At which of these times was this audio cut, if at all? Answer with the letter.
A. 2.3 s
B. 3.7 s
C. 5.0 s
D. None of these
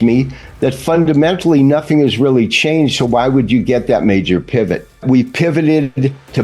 C